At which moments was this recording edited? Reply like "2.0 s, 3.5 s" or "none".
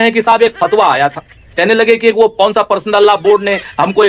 none